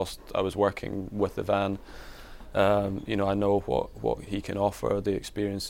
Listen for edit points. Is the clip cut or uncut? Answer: uncut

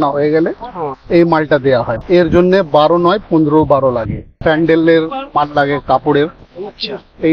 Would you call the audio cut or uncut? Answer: cut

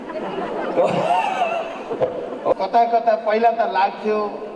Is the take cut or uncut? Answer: cut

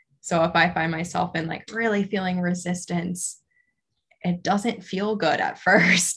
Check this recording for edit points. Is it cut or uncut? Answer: uncut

